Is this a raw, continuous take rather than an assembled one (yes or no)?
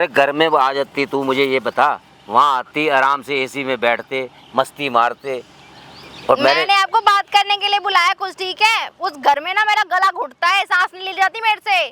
yes